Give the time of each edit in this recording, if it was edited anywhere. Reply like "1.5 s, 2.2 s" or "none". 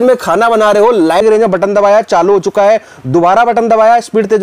1.2 s